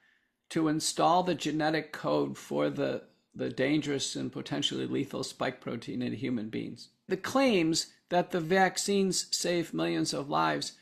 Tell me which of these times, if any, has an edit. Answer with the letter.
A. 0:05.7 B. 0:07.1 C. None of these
B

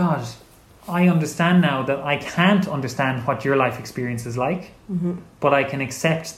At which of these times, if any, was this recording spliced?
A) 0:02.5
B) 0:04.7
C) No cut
C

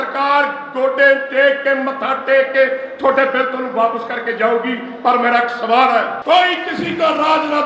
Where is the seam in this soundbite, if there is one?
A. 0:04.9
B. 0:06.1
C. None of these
B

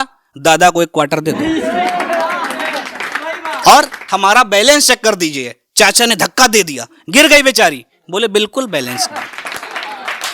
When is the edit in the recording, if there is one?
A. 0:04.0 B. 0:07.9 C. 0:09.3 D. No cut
A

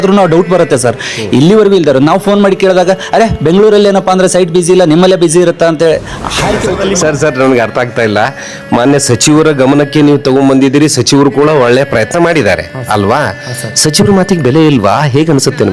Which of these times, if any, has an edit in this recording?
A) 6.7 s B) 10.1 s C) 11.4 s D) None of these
A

